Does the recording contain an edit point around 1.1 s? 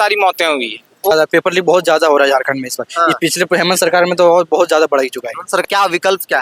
yes; 2 cuts; at 1.1 s, 5.7 s

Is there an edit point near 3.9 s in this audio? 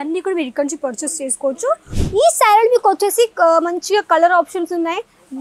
no; 1 cut; at 1.9 s

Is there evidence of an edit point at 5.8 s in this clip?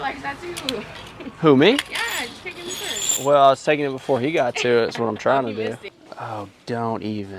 yes; 1 cut; at 5.8 s

